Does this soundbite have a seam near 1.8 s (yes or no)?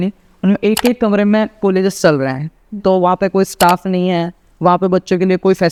no